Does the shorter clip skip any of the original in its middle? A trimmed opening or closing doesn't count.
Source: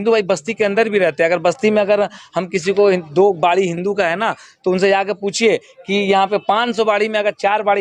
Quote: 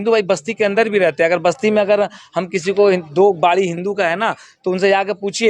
no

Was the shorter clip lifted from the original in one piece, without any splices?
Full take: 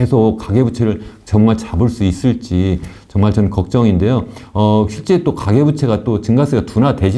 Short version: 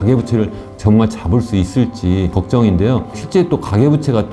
no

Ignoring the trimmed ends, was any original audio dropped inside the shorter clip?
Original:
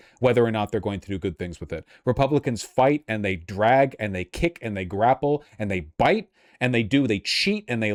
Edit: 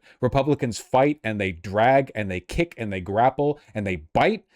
no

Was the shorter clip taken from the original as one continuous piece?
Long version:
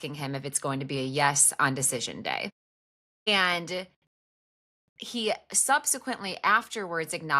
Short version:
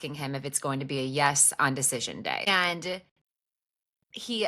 no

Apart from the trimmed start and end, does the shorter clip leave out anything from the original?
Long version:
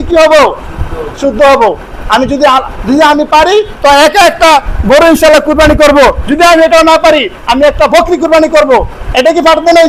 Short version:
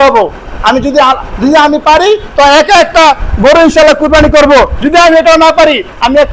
no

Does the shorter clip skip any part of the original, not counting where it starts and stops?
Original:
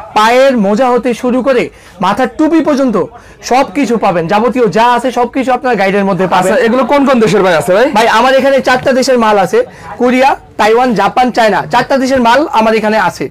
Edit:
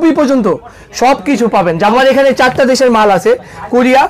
yes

